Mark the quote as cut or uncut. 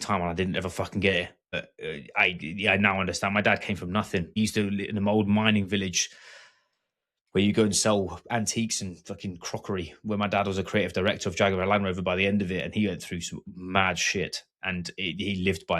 cut